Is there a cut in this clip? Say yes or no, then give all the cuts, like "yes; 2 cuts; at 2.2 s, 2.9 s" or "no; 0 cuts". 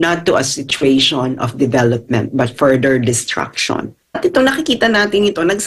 yes; 1 cut; at 4.0 s